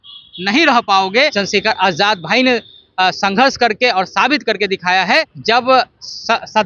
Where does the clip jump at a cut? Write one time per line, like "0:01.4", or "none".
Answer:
0:01.3
0:05.3